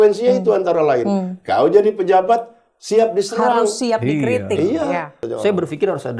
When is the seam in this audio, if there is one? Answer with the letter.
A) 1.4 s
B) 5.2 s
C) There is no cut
B